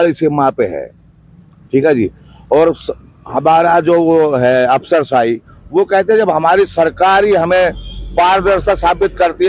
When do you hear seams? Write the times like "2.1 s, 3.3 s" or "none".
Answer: none